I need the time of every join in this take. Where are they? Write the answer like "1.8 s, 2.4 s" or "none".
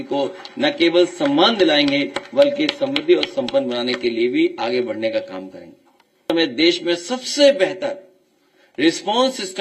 6.2 s